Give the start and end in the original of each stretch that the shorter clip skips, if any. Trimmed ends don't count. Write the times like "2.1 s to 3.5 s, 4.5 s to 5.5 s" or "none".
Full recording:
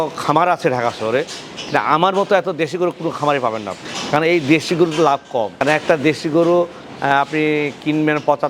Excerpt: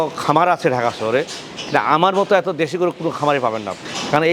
none